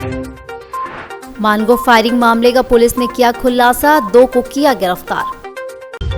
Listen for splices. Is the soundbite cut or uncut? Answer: uncut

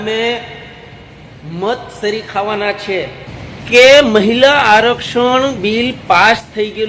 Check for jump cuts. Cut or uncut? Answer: cut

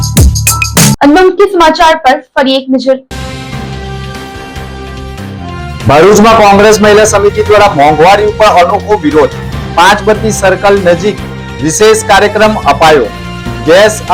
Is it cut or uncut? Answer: uncut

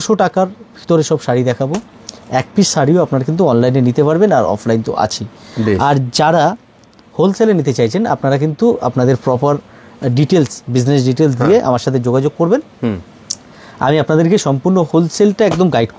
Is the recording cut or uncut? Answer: uncut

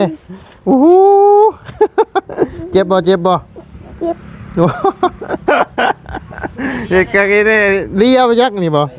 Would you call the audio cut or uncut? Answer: uncut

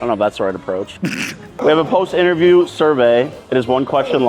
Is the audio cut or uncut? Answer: cut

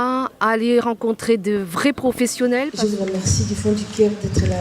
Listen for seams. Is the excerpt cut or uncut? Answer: cut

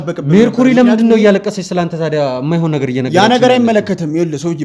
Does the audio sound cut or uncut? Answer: uncut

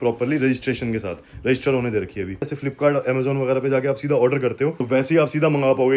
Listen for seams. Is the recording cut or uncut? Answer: cut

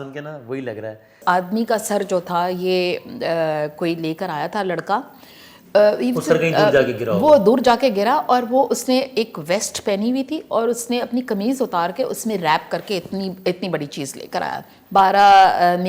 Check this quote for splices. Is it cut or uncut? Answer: cut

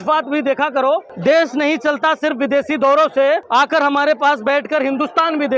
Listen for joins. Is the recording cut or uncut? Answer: cut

